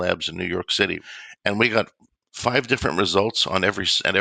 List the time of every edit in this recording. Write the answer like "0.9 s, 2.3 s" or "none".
1.1 s